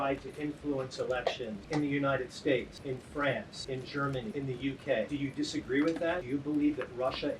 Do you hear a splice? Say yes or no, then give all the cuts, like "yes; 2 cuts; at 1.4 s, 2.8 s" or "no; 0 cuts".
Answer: yes; 5 cuts; at 1.6 s, 2.7 s, 3.9 s, 5.1 s, 6.2 s